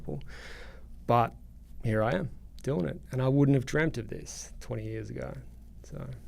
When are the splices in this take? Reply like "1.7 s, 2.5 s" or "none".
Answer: none